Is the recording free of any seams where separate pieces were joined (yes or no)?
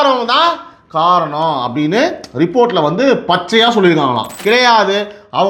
no